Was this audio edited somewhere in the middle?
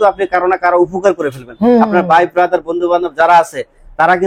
no; 0 cuts

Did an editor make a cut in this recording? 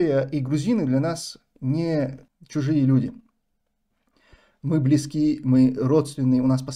no; 0 cuts

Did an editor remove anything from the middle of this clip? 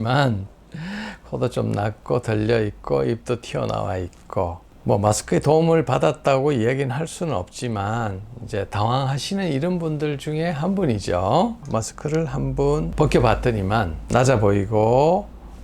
yes; 1 cut; at 11.6 s

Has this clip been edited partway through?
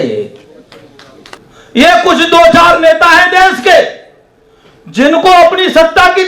yes; 1 cut; at 1.4 s

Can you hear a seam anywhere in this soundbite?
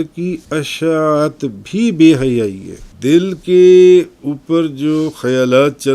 yes; 1 cut; at 2.9 s

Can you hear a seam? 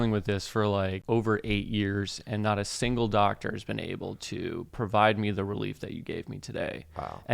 yes; 1 cut; at 1.0 s

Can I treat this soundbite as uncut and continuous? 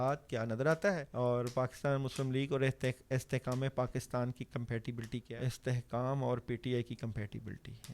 no; 2 cuts; at 1.1 s, 5.3 s

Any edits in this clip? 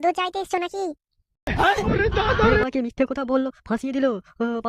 no; 0 cuts

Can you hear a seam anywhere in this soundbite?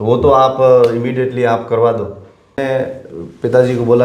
yes; 1 cut; at 2.6 s

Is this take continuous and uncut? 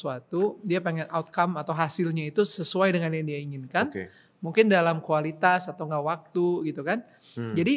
yes; 0 cuts

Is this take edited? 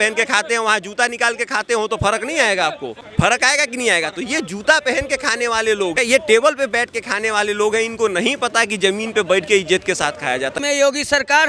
yes; 3 cuts; at 2.9 s, 6.0 s, 10.5 s

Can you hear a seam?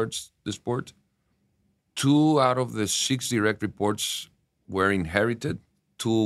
no; 0 cuts

